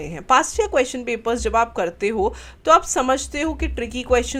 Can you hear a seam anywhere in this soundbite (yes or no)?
no